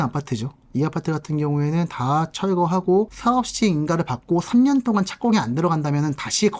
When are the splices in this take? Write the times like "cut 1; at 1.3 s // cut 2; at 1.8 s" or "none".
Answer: cut 1; at 3.1 s